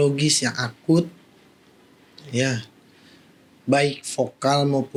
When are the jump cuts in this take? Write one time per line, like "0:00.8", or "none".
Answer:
none